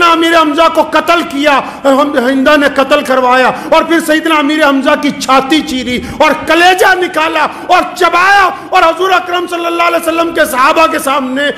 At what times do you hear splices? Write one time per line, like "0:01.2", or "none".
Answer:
none